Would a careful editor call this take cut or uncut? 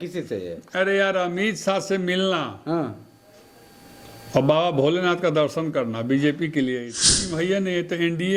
cut